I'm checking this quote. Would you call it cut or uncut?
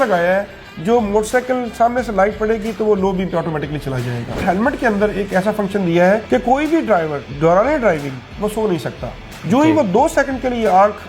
cut